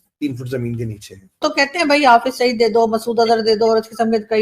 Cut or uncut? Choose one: cut